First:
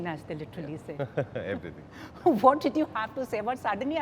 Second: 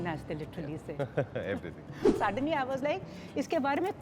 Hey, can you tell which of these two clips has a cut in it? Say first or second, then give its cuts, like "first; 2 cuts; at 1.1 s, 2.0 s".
second; 1 cut; at 2.2 s